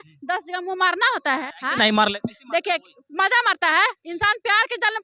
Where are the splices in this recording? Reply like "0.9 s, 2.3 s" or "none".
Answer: 1.4 s